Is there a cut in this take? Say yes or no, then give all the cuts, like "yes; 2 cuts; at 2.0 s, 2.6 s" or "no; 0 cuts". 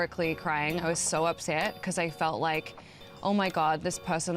no; 0 cuts